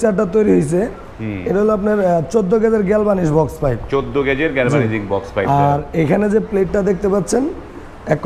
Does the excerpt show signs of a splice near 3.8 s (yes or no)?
no